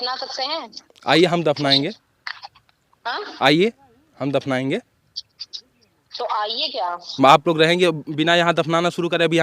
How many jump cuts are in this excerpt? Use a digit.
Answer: 1